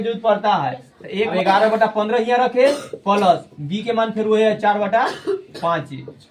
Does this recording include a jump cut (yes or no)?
yes